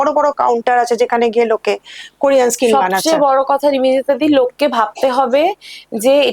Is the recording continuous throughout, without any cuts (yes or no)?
yes